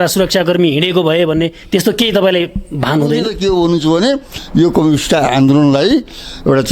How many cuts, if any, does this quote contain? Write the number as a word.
one